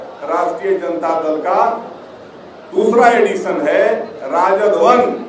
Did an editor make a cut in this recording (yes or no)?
no